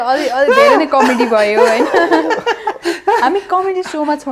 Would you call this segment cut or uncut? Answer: uncut